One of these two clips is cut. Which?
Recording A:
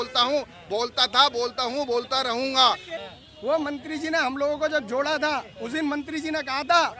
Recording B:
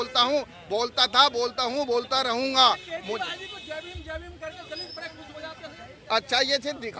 A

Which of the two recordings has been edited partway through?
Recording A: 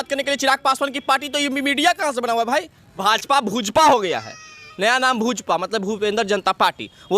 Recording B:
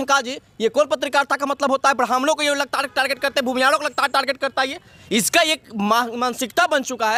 A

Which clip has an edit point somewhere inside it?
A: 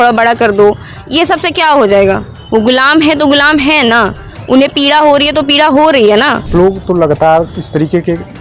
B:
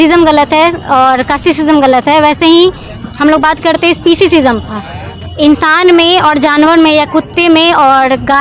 A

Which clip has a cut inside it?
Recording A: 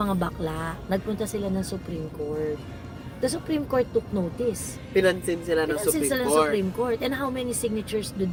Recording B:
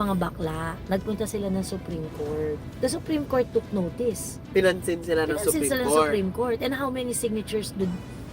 B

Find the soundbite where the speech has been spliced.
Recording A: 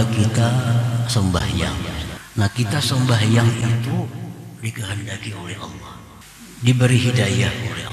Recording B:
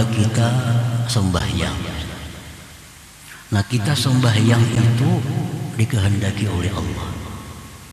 A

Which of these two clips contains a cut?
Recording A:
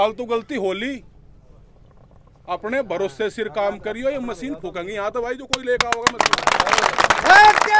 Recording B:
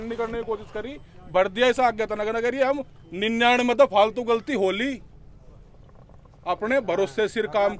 B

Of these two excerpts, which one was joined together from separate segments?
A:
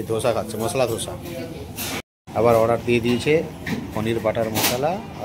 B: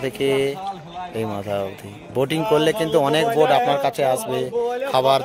A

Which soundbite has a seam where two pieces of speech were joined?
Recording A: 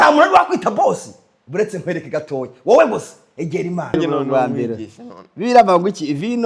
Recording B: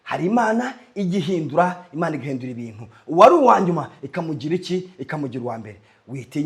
A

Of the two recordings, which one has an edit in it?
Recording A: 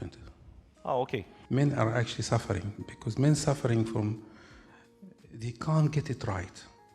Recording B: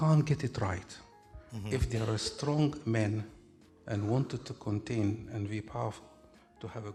A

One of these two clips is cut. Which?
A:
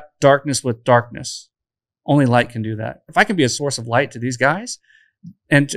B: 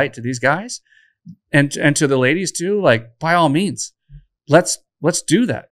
A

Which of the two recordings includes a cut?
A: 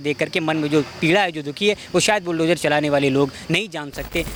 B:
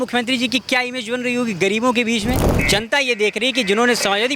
B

